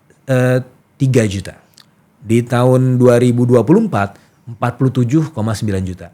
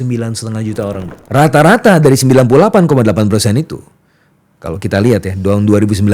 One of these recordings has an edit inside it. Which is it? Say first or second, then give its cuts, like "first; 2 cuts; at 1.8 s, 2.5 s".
second; 1 cut; at 1.1 s